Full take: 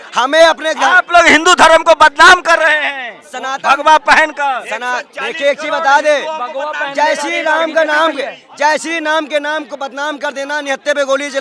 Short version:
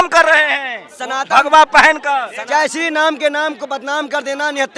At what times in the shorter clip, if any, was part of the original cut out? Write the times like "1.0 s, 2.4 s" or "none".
2.4 s